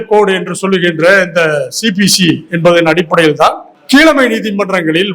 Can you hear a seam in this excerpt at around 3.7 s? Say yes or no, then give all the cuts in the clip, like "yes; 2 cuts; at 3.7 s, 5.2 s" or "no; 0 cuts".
yes; 1 cut; at 3.7 s